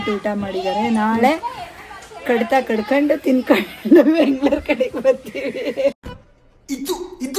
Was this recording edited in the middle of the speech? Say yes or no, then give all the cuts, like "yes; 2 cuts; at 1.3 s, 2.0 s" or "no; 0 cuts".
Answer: yes; 1 cut; at 6.0 s